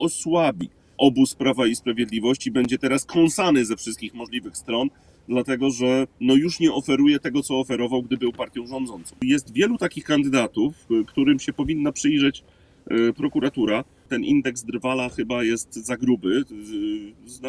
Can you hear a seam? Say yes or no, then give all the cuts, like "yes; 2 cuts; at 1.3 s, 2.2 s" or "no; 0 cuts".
yes; 3 cuts; at 1.0 s, 9.2 s, 14.1 s